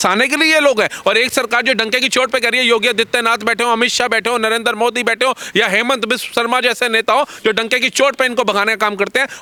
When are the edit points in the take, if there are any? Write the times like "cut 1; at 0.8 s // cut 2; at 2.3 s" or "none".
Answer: none